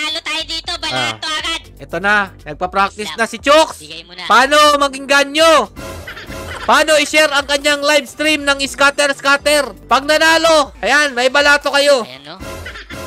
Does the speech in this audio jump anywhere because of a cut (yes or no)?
no